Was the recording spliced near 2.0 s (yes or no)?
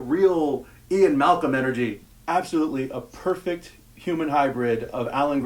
yes